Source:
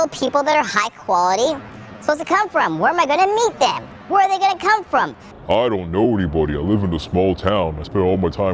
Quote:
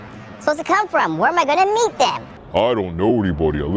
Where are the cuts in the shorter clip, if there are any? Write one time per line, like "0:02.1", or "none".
0:02.3